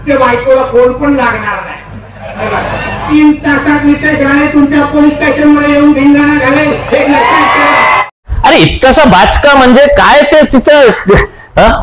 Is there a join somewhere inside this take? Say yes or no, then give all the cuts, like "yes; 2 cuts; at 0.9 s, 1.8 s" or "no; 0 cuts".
yes; 2 cuts; at 3.0 s, 8.1 s